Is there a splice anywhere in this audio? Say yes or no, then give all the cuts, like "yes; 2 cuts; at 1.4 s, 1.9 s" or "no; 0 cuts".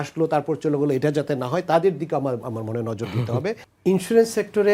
yes; 1 cut; at 3.7 s